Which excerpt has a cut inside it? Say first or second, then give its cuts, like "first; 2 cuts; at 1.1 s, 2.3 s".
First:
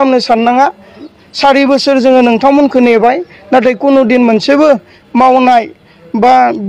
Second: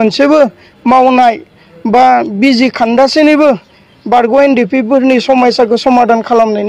first; 1 cut; at 1.1 s